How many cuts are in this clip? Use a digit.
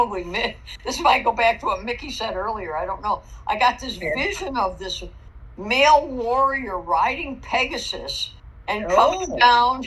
0